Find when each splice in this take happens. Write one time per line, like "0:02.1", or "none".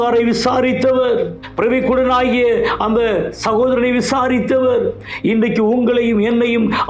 0:01.4